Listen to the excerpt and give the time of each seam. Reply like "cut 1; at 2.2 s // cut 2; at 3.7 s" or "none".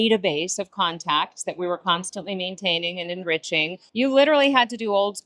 cut 1; at 3.8 s